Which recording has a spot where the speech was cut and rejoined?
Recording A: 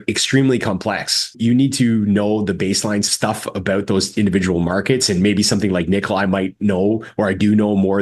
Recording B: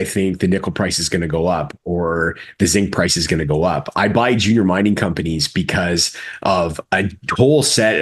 A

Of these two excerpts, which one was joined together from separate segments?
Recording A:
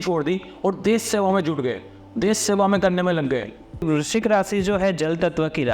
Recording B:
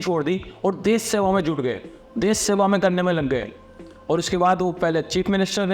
A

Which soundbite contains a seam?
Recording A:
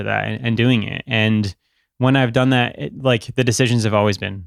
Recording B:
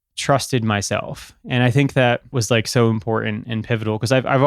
B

